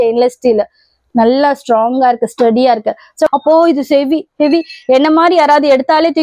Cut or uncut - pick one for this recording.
cut